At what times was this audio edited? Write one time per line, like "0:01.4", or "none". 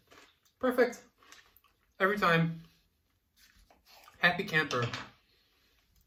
none